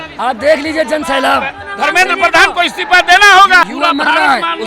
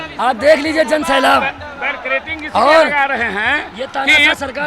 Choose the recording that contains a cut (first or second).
first